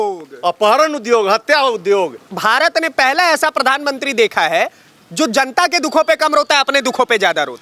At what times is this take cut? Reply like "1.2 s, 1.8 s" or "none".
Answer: 2.3 s